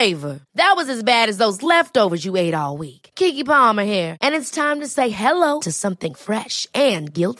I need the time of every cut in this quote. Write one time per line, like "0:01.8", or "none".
none